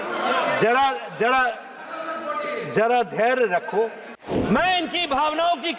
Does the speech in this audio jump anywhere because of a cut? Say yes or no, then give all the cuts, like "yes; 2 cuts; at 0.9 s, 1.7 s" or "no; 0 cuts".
yes; 1 cut; at 4.3 s